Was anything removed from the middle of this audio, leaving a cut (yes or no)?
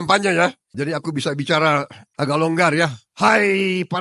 yes